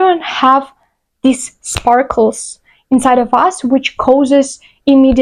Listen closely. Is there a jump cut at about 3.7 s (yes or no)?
no